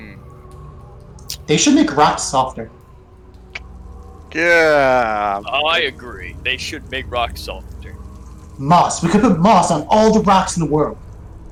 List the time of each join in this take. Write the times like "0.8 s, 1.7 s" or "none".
none